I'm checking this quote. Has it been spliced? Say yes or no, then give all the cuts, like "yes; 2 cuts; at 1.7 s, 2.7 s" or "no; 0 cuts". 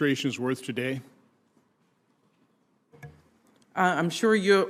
no; 0 cuts